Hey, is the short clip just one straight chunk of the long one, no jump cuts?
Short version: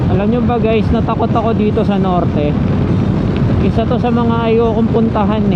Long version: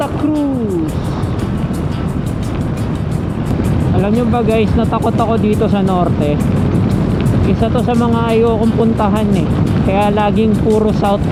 yes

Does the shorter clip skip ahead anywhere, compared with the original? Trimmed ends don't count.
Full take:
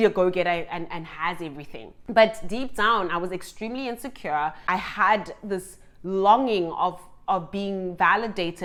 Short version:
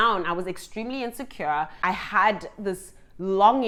no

